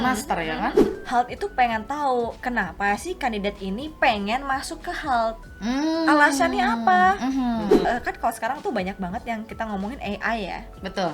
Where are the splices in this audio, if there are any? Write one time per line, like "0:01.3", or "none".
0:00.9
0:07.8